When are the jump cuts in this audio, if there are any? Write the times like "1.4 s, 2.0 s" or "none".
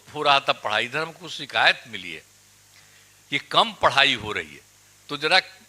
1.3 s